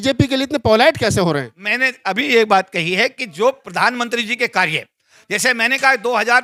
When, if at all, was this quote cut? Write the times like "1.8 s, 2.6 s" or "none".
none